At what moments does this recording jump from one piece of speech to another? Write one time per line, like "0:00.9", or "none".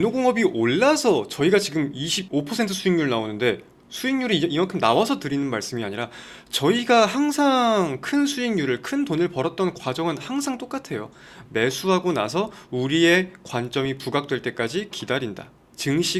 none